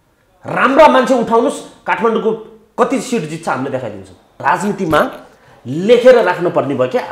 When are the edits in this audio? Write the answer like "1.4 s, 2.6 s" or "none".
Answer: 4.3 s